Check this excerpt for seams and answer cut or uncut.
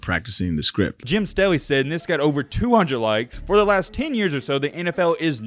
cut